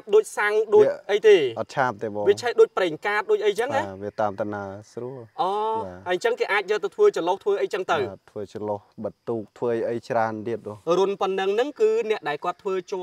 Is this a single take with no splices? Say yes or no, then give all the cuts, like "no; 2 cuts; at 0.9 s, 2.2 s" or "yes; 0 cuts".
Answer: no; 1 cut; at 10.7 s